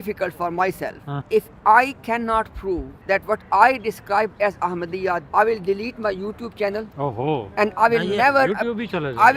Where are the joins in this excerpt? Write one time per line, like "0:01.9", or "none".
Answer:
0:01.1
0:02.9
0:05.3